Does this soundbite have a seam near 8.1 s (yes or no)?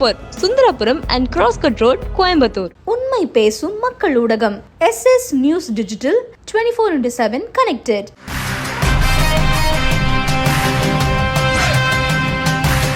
no